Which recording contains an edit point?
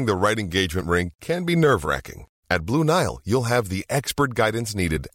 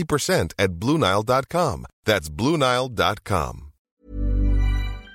second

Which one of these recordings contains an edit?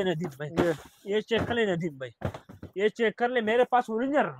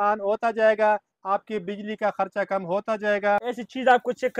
second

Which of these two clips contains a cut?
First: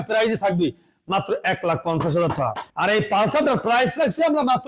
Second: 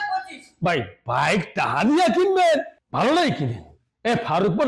first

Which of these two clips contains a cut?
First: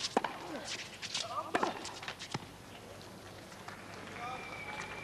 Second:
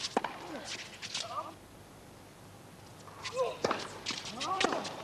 first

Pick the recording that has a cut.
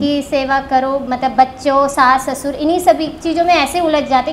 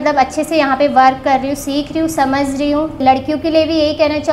second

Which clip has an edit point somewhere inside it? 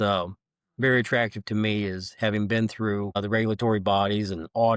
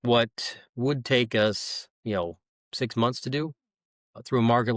first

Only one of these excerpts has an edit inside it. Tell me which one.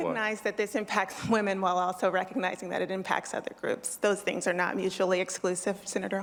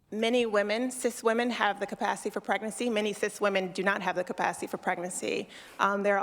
second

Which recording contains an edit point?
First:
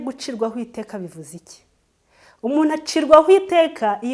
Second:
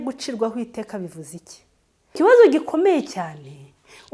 second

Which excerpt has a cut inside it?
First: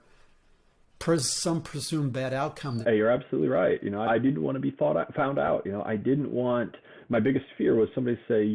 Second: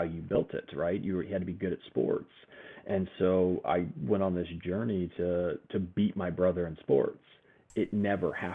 first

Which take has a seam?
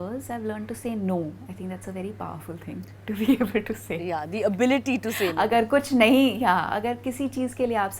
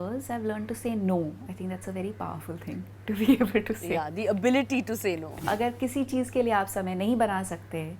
second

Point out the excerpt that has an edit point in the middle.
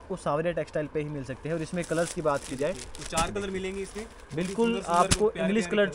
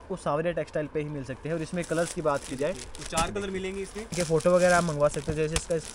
second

